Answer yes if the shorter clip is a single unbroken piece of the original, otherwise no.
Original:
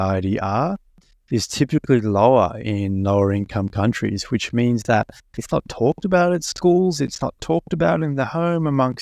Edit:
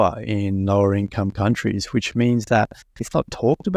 yes